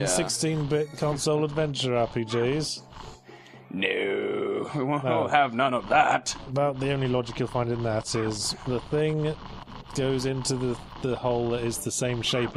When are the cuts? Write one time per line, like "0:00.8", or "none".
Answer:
0:08.1